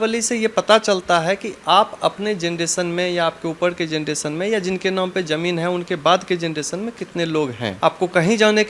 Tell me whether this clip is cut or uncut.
cut